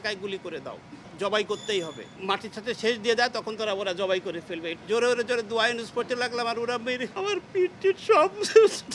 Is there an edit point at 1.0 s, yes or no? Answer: yes